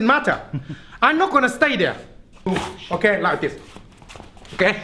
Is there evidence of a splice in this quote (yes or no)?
yes